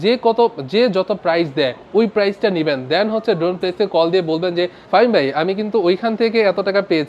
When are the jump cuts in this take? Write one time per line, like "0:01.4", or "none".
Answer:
0:01.8
0:04.8